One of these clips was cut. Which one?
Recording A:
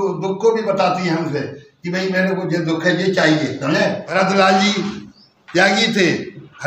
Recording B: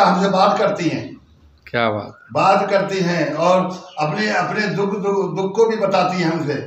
A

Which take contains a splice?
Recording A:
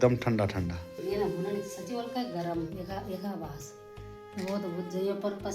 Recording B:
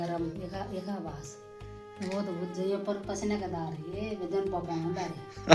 A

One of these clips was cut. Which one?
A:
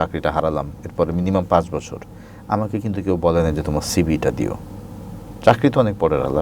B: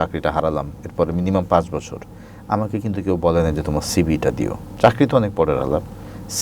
B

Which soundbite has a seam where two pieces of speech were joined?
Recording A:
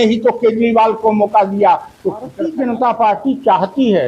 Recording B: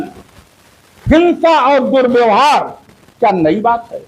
A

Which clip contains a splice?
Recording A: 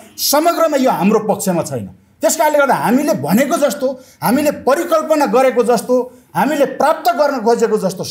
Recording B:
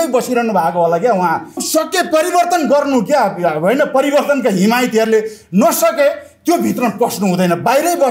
B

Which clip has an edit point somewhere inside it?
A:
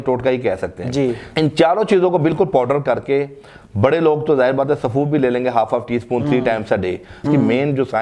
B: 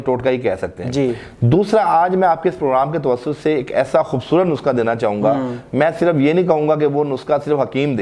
A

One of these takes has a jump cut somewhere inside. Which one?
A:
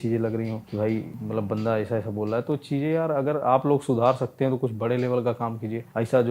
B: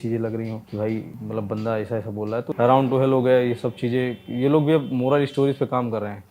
B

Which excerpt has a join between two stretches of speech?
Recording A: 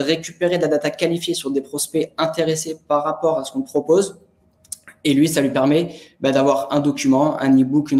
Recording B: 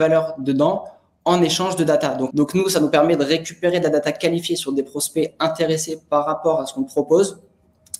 B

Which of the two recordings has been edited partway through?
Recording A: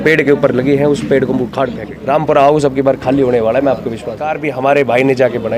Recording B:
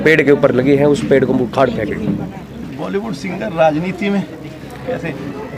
A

